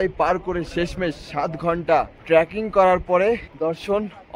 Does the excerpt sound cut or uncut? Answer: cut